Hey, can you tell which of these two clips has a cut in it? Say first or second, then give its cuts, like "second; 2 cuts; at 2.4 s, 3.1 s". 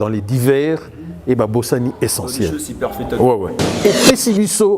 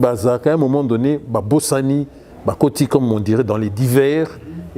first; 1 cut; at 3.7 s